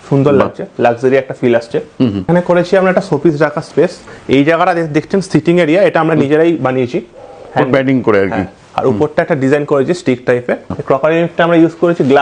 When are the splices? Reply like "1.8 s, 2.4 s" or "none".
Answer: 2.2 s, 4.1 s, 10.7 s